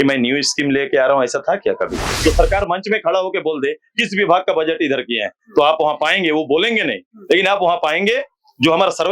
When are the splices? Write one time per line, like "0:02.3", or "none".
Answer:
0:02.1